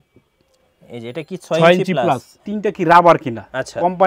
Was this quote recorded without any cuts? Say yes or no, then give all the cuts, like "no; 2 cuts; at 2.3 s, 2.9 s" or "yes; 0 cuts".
no; 1 cut; at 2.4 s